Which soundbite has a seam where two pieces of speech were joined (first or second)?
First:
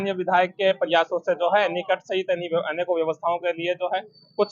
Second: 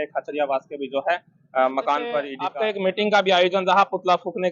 second